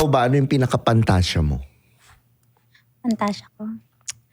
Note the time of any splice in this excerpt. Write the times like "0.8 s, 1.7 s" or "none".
none